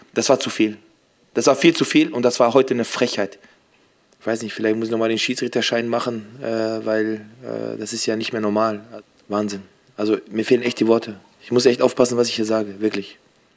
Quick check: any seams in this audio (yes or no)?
yes